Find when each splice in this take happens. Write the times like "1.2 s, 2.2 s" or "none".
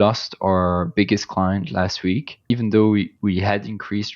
2.4 s